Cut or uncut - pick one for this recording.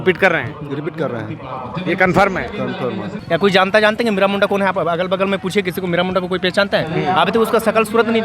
cut